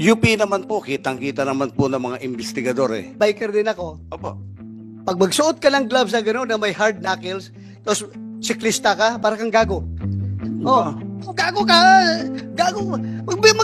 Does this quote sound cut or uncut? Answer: cut